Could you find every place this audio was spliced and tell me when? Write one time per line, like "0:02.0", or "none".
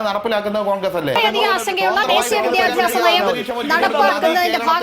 0:01.2